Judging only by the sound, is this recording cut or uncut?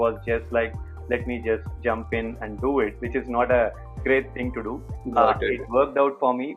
uncut